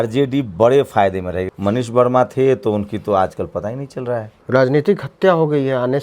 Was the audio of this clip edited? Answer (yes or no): yes